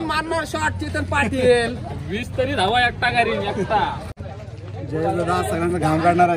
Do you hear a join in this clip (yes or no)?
yes